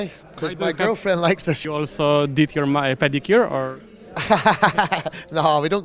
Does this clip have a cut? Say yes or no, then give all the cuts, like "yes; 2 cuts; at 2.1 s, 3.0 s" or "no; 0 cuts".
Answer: yes; 1 cut; at 1.6 s